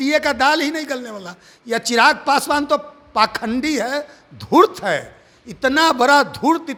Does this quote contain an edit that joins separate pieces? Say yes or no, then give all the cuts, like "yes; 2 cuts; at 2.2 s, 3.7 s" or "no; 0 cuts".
no; 0 cuts